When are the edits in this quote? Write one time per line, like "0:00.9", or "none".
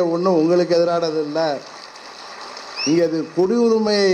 none